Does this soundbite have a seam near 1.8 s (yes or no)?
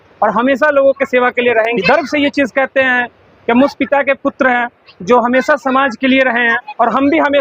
yes